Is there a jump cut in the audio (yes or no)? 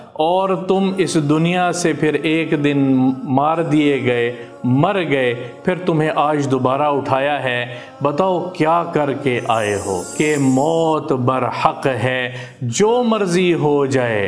yes